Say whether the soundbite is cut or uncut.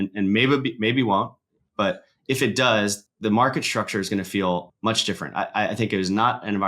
cut